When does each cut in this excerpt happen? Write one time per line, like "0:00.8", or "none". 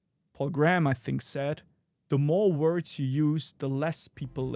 none